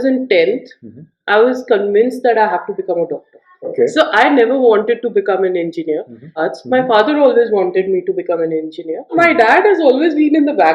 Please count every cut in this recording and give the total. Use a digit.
3